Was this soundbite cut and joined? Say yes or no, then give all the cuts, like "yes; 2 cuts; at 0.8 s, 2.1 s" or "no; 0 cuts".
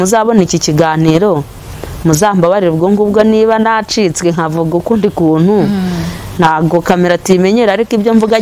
no; 0 cuts